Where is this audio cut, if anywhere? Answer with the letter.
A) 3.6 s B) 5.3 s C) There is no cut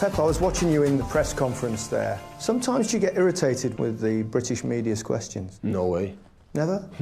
B